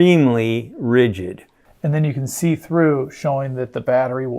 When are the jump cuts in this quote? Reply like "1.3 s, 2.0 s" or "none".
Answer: 1.7 s

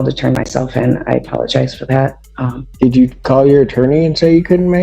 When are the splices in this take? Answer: 2.6 s

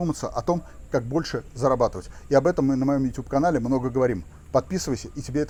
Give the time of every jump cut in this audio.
none

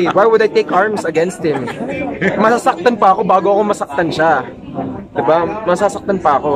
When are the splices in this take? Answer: none

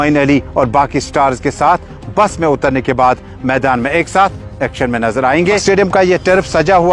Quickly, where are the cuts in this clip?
5.6 s

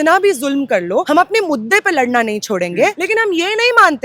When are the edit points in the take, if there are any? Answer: 1.1 s, 3.0 s

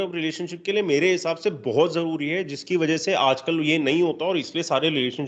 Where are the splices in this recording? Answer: none

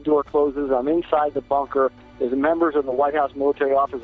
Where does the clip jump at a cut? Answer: none

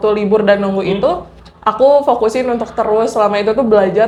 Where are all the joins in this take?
none

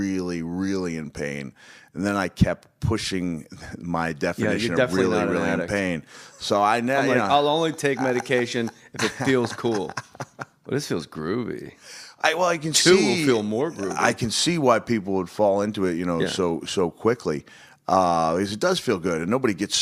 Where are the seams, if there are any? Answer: none

